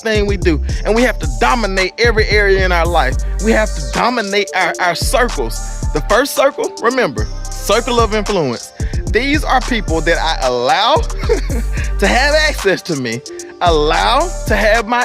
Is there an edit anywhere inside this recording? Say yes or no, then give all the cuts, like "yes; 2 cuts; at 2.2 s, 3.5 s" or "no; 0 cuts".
no; 0 cuts